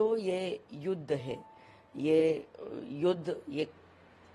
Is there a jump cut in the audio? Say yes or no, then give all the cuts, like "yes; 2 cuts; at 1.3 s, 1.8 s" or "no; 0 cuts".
no; 0 cuts